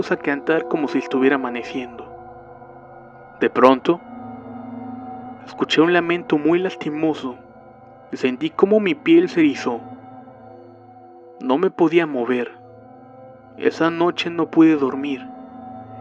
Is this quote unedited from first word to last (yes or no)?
yes